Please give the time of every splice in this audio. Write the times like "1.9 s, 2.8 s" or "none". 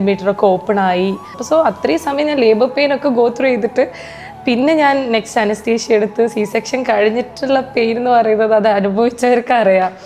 1.4 s